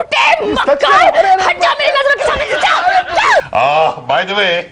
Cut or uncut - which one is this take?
cut